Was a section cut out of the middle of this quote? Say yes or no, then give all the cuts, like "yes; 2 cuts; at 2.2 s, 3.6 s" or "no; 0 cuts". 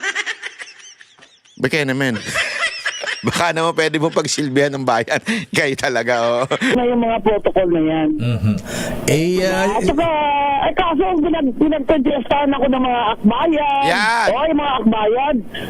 yes; 1 cut; at 6.7 s